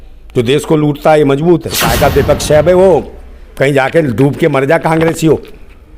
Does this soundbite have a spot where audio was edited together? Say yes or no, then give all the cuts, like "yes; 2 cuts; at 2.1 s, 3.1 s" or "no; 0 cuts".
yes; 1 cut; at 1.8 s